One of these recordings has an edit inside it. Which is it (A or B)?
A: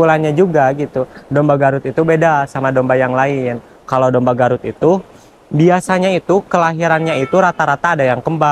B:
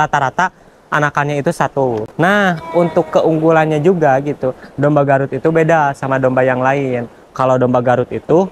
B